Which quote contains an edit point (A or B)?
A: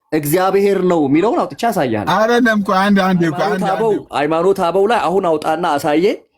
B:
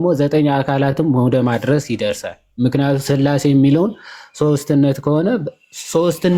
A